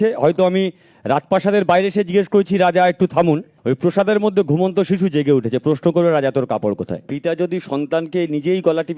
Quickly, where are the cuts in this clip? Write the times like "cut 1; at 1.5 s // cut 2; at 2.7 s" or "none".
cut 1; at 3.5 s // cut 2; at 7.0 s